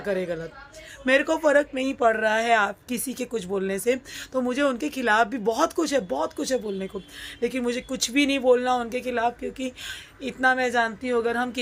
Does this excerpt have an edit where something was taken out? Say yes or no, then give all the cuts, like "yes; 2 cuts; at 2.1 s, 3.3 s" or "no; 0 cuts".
no; 0 cuts